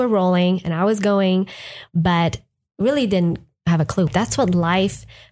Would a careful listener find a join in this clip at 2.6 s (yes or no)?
no